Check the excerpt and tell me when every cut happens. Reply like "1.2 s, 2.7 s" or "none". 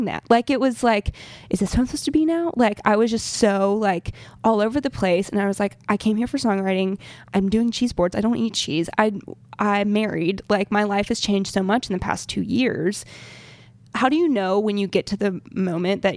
13.9 s